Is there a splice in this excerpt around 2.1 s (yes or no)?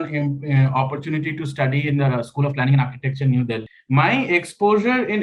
no